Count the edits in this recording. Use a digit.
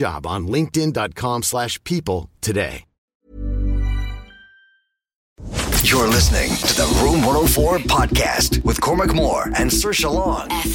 2